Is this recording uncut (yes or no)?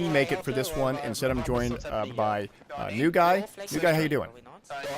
no